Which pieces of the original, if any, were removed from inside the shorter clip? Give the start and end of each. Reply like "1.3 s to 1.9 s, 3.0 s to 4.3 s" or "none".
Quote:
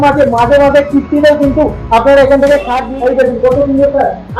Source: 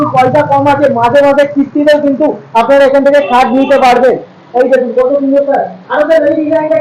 3.4 s to 4.3 s